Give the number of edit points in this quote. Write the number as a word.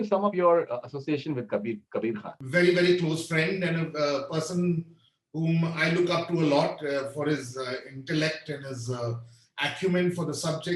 zero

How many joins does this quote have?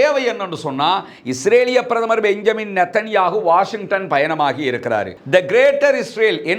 one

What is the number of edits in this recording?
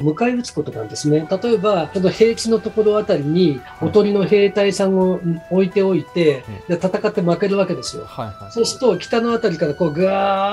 one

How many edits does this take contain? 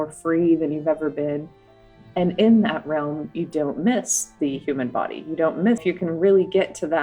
one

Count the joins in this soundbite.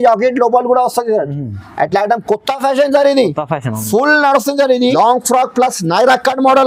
one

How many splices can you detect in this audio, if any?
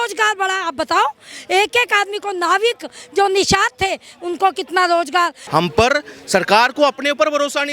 one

